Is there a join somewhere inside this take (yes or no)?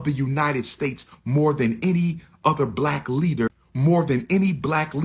yes